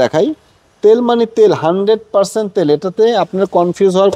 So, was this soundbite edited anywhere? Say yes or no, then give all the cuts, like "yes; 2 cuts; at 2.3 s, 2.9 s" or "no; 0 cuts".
no; 0 cuts